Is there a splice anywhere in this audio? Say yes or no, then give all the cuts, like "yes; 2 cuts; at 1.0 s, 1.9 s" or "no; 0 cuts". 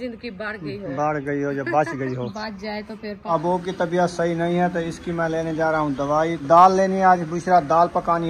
yes; 2 cuts; at 3.3 s, 6.4 s